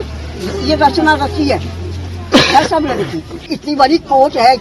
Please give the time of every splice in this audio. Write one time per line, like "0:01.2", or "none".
0:03.5

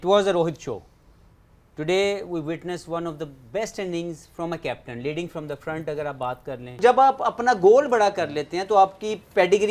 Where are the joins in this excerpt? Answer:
0:06.8

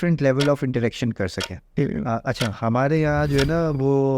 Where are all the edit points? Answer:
0:01.7

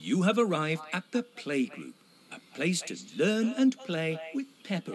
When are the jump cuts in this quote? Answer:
none

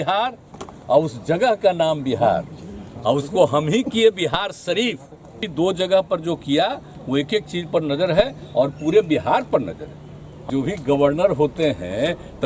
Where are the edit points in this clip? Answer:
0:05.5
0:10.5

